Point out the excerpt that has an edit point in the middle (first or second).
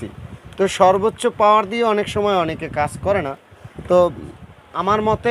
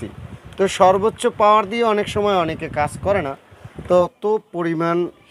second